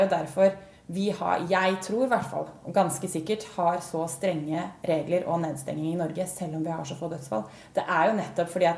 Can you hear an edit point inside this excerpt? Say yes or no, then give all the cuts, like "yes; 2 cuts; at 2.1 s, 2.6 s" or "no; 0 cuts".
no; 0 cuts